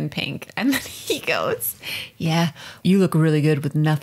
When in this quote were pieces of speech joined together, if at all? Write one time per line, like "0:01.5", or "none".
0:02.8